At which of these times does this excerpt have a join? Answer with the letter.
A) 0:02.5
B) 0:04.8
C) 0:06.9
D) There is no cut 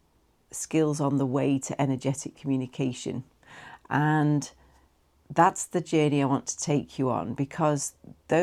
D